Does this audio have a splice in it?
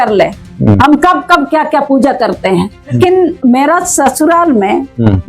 yes; 1 cut; at 2.9 s

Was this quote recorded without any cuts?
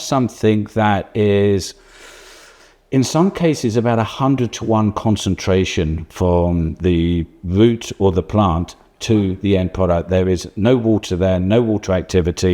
yes; 0 cuts

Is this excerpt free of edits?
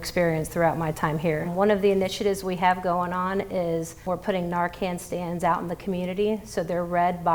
no; 1 cut; at 1.5 s

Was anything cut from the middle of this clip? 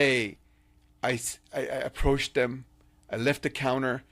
no; 0 cuts

